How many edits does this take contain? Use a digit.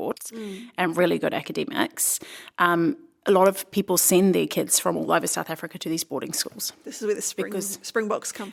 0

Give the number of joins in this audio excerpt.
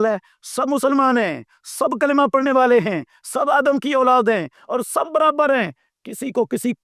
0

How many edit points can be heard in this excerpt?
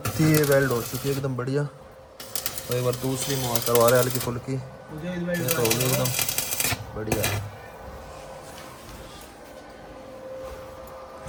0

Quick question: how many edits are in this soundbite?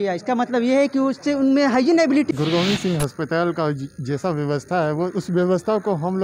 1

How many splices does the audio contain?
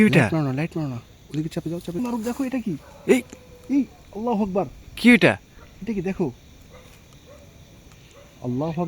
1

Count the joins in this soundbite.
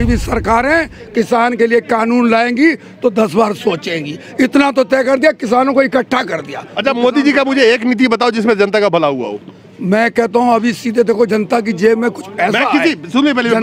0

